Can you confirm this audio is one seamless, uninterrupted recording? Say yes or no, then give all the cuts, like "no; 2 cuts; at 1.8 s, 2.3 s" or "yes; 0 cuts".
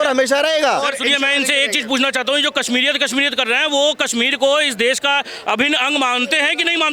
yes; 0 cuts